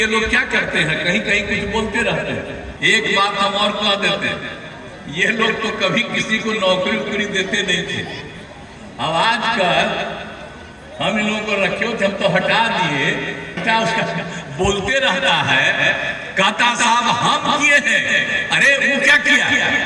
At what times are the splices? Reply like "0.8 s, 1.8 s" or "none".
2.6 s, 13.6 s